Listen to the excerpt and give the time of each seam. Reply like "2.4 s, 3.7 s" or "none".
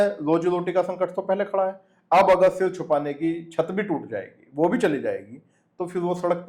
none